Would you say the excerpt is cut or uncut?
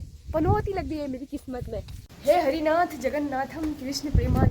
cut